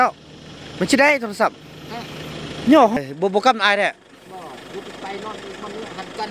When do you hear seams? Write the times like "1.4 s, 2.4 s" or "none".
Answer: 3.0 s